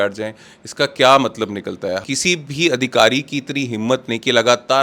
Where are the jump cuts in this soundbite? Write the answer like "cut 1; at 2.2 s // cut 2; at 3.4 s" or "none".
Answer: cut 1; at 2.0 s